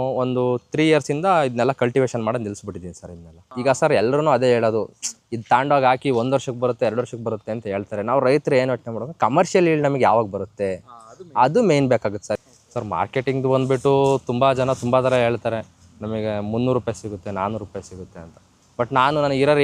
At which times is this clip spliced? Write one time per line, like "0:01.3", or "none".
0:03.5
0:12.3